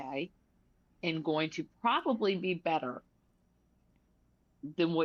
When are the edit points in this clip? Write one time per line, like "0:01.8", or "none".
none